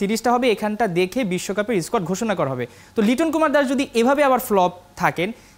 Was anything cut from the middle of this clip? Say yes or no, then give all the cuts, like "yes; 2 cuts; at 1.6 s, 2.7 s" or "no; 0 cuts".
no; 0 cuts